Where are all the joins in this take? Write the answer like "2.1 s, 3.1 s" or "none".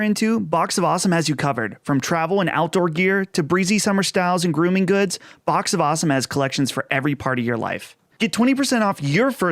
8.0 s